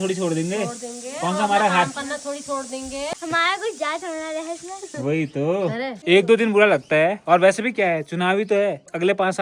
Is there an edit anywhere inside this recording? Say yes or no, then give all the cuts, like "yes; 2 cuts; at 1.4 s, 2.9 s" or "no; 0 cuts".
no; 0 cuts